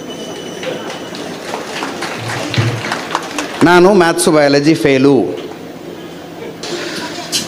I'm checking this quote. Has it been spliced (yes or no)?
yes